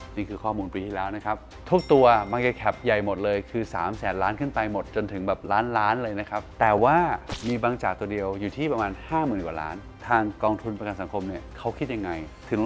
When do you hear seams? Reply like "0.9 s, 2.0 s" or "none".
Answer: 1.5 s, 9.9 s